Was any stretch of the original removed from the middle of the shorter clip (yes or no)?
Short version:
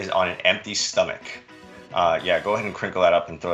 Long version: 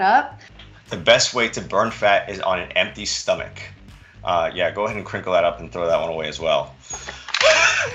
no